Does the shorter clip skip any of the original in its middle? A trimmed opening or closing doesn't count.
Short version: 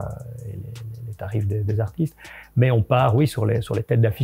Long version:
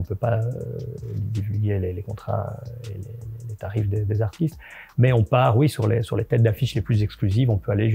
no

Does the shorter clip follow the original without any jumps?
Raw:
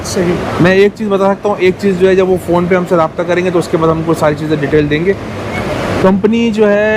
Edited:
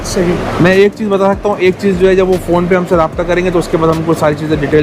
yes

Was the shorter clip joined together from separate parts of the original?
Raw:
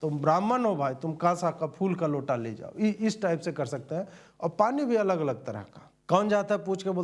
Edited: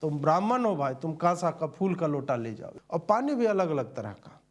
yes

